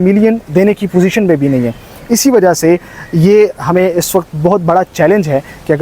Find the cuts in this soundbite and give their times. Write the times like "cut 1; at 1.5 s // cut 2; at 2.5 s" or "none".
none